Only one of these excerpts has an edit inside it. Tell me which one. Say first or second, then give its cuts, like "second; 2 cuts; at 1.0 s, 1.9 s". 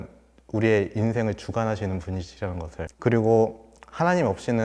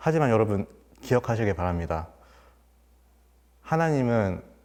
first; 1 cut; at 2.9 s